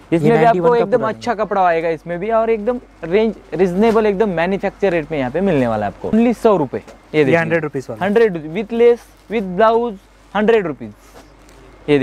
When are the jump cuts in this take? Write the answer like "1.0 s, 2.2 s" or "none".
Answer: 6.1 s